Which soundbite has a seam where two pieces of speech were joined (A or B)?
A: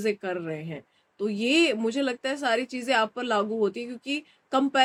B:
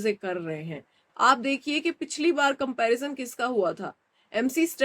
B